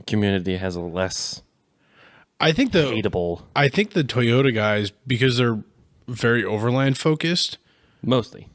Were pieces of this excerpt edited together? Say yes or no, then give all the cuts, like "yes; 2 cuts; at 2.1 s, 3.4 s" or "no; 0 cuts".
no; 0 cuts